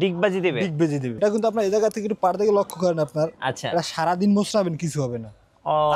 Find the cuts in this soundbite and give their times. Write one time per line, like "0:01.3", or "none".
0:01.2